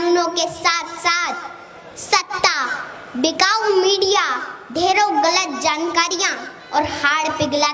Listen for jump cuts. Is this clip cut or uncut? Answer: uncut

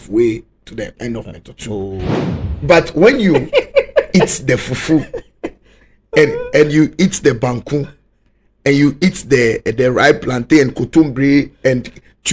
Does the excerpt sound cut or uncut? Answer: cut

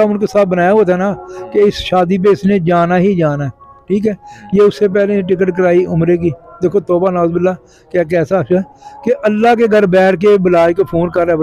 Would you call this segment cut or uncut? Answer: uncut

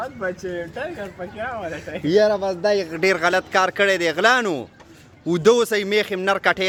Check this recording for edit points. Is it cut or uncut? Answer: uncut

